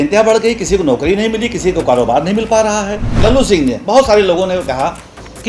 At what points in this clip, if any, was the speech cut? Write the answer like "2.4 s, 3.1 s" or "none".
3.1 s

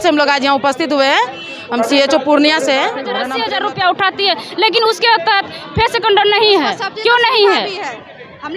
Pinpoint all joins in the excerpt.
3.2 s

